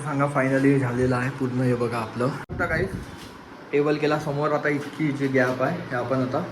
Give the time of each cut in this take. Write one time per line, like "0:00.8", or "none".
0:02.5